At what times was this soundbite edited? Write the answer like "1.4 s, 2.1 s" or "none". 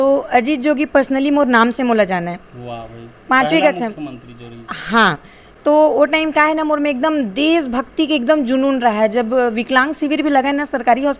none